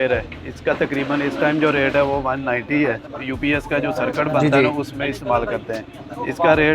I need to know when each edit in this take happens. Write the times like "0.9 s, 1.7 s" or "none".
3.2 s